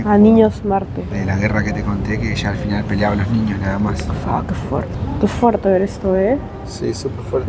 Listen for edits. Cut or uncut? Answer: uncut